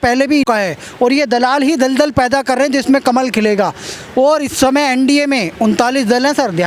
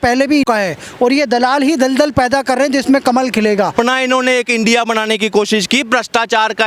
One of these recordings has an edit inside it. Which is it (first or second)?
second